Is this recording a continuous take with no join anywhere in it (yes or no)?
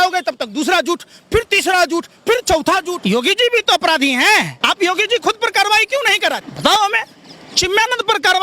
no